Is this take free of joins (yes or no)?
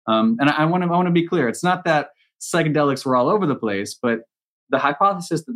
no